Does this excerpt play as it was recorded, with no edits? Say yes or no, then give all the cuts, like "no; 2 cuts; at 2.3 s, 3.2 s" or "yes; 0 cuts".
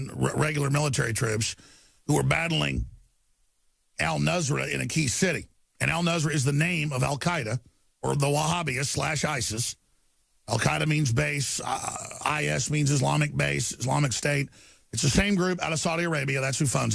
no; 1 cut; at 4.7 s